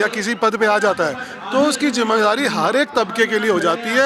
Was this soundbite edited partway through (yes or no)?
no